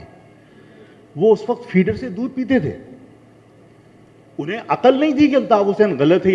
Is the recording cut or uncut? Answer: uncut